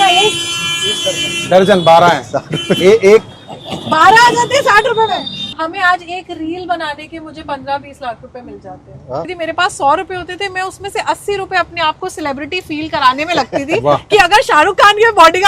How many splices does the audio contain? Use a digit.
2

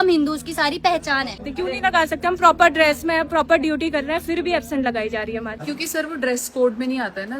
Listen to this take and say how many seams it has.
2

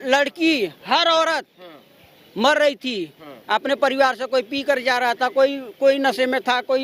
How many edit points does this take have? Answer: 0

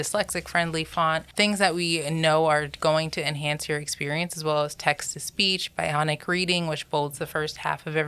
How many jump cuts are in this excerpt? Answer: 1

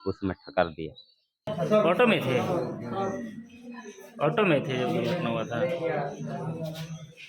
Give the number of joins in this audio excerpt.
1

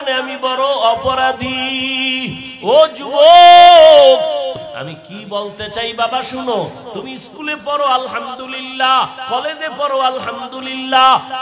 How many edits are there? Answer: 1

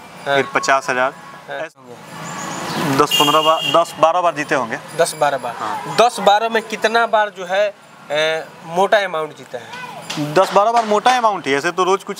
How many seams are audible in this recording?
1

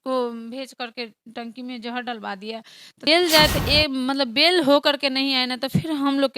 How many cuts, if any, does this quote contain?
1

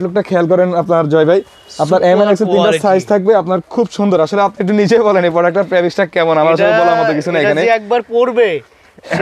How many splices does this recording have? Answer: 0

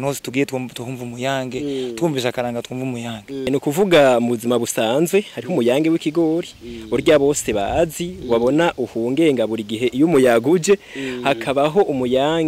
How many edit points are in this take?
1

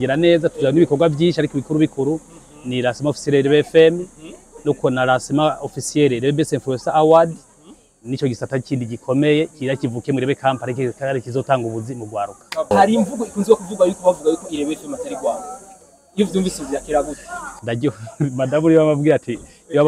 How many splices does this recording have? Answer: 1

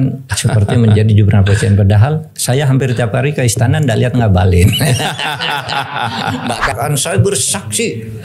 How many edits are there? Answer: 1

